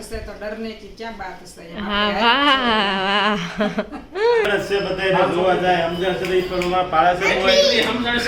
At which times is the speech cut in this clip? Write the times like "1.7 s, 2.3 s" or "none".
4.4 s